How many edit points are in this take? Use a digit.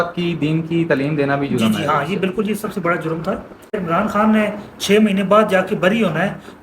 1